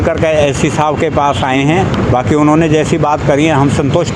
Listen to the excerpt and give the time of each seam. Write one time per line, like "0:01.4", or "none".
none

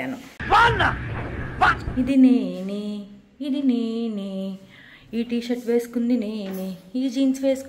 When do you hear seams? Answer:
0:01.8

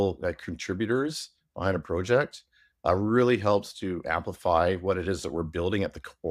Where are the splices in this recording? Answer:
none

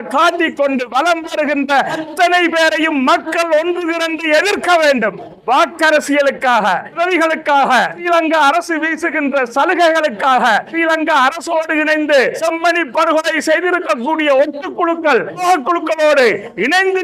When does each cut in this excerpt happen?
0:02.1
0:05.3
0:07.0
0:08.0
0:10.7
0:12.4
0:15.4

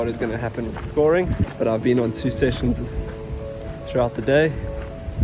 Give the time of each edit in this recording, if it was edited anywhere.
0:01.5

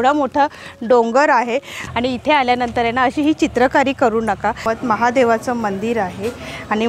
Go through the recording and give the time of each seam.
0:01.7
0:04.6

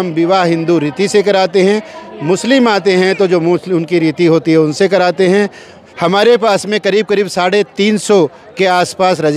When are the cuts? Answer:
0:05.8

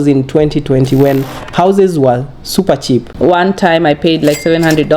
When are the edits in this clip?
0:03.1

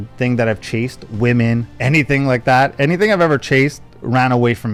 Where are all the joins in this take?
none

